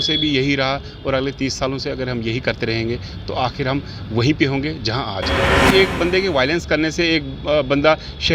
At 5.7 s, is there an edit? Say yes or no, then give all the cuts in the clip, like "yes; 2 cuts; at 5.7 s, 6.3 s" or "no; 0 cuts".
yes; 1 cut; at 5.7 s